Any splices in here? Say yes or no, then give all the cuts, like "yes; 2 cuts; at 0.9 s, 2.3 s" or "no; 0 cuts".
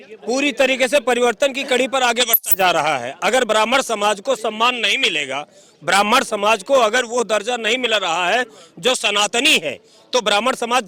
no; 0 cuts